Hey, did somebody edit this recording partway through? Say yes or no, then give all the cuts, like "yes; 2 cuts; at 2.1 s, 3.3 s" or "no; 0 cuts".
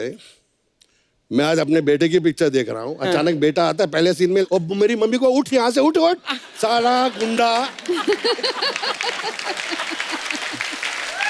no; 0 cuts